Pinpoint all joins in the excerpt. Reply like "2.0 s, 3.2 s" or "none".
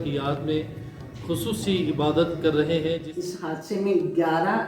3.1 s

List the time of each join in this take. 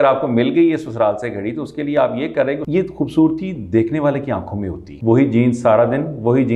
2.6 s, 4.9 s

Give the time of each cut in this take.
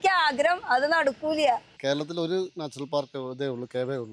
1.7 s

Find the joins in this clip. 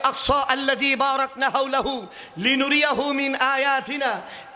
none

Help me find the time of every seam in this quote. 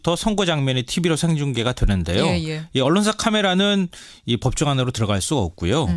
2.4 s

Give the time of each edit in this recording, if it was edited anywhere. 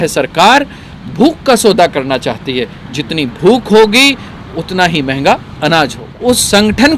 6.1 s

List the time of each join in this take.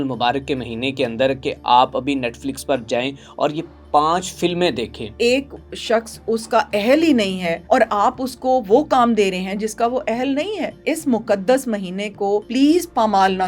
5.2 s, 7.5 s, 10.7 s, 12.5 s

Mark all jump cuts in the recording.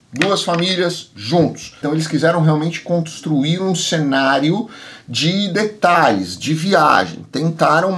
1.8 s

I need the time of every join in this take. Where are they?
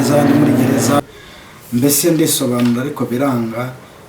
1.0 s

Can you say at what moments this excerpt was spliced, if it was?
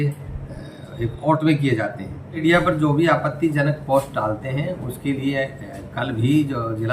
2.4 s

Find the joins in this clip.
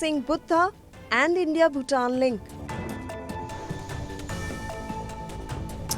2.3 s

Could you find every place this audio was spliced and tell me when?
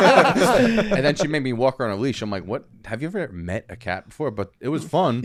none

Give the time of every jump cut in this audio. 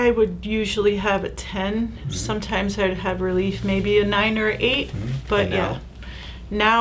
none

